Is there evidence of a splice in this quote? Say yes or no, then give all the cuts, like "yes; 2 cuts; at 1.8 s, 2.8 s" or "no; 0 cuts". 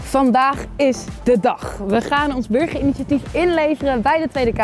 no; 0 cuts